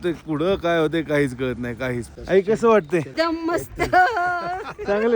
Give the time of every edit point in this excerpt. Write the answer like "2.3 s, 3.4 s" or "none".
2.1 s, 3.1 s